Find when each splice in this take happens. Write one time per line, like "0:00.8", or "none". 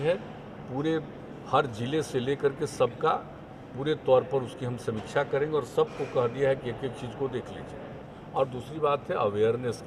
0:08.1